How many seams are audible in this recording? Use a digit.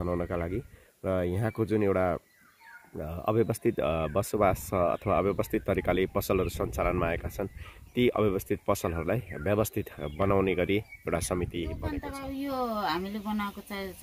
1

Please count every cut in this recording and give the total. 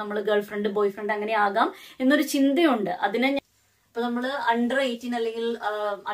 1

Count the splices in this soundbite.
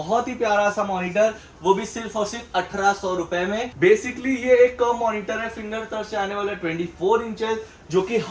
1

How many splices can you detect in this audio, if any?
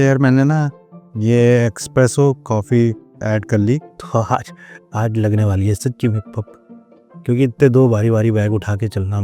1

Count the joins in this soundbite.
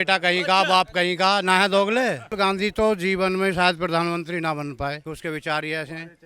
2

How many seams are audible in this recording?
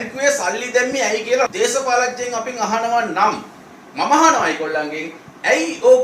1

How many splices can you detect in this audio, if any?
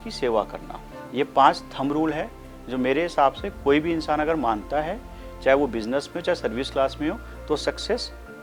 0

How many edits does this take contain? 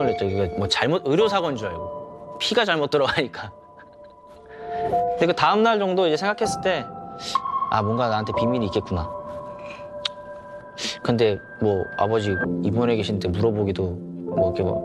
0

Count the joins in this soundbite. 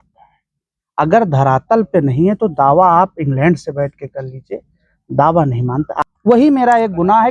1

